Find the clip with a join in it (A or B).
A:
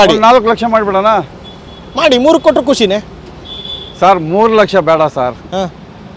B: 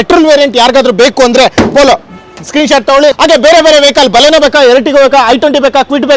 B